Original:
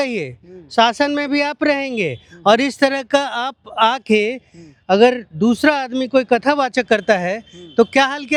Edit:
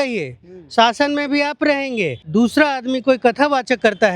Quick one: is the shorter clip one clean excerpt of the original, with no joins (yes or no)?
no